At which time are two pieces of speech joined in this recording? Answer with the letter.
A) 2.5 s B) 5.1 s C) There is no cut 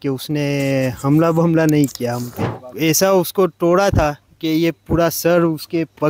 A